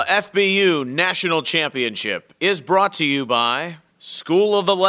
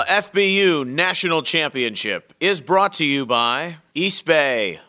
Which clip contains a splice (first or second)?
second